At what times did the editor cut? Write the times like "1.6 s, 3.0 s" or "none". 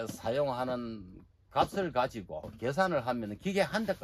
none

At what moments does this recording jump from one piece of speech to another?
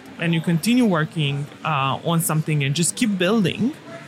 none

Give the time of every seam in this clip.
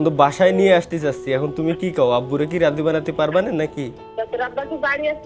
4.0 s

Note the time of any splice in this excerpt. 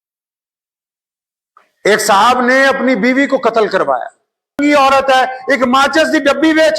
4.6 s

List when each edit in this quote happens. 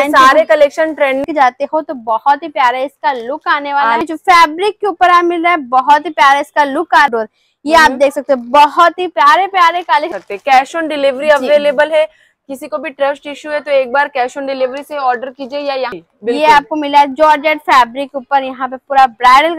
1.2 s, 4.0 s, 7.1 s, 10.1 s, 16.0 s

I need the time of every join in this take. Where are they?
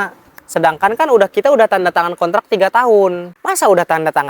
3.3 s

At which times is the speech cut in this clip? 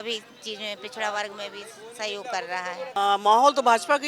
3.0 s

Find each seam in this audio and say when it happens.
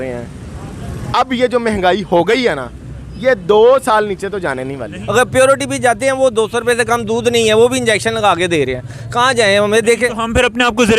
5.0 s

